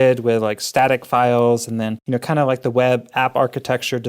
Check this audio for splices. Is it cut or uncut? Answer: cut